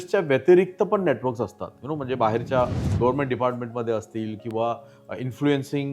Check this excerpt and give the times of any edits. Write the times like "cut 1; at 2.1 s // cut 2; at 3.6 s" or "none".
none